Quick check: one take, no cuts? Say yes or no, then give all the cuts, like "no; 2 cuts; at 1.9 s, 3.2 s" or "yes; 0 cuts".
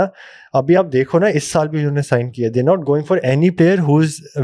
yes; 0 cuts